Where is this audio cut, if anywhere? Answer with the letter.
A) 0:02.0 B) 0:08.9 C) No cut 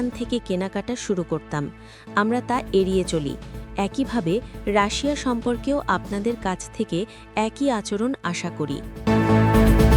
B